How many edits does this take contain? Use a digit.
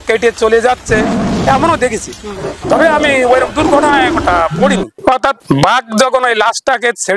0